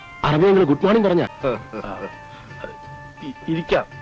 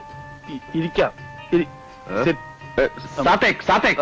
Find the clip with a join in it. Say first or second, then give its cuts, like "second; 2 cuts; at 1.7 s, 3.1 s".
first; 1 cut; at 1.3 s